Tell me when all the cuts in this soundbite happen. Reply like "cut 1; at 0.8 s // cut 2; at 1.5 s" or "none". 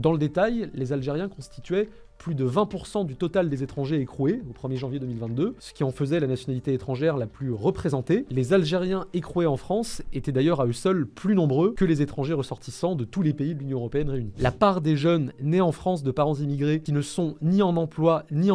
cut 1; at 14.4 s // cut 2; at 16.9 s

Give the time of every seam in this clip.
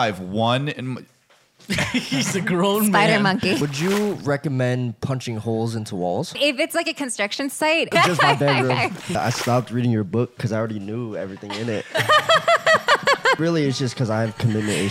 cut 1; at 3.6 s // cut 2; at 6.3 s // cut 3; at 7.9 s // cut 4; at 9.2 s // cut 5; at 13.4 s

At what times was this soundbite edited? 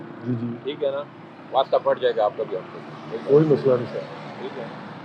none

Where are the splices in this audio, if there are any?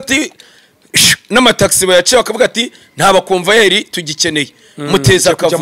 none

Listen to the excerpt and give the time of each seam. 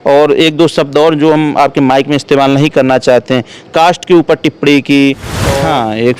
cut 1; at 5.3 s

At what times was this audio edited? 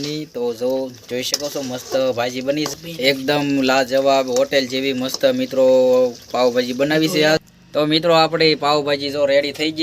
cut 1; at 2.7 s // cut 2; at 7.6 s

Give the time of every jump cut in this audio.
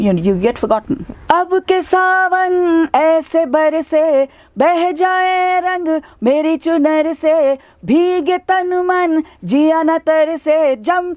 cut 1; at 1.1 s

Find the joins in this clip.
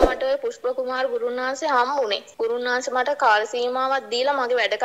cut 1; at 2.2 s

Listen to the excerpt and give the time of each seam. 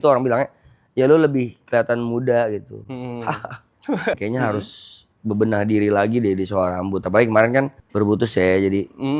cut 1; at 4.2 s // cut 2; at 7.8 s

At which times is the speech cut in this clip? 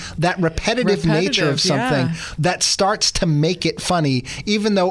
none

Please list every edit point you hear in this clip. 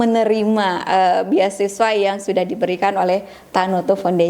none

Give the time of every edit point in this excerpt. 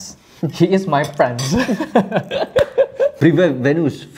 cut 1; at 3.1 s

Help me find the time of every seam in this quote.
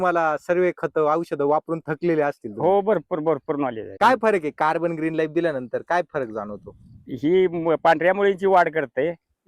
cut 1; at 3.8 s

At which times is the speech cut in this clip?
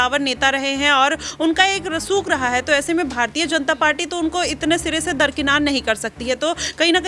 none

